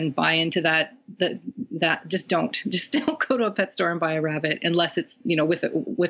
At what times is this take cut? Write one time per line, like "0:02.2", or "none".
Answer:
0:05.1